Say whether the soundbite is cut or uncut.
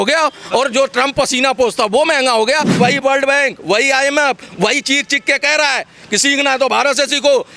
cut